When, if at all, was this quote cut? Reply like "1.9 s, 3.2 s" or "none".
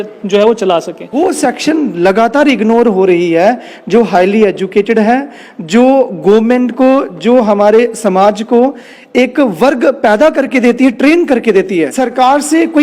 1.1 s, 12.0 s